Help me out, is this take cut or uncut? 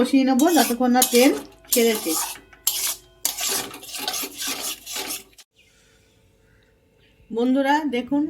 cut